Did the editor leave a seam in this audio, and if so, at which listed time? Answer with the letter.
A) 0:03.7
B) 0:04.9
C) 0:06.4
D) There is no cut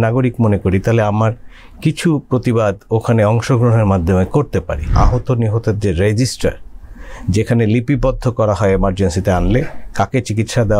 B